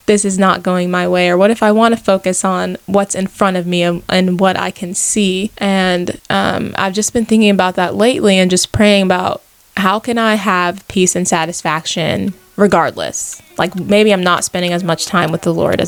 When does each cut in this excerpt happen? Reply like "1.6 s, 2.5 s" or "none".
none